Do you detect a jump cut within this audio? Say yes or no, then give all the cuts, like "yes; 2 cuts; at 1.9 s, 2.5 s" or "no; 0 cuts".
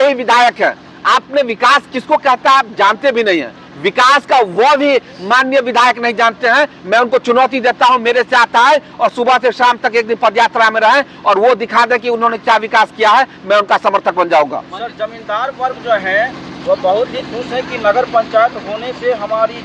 no; 0 cuts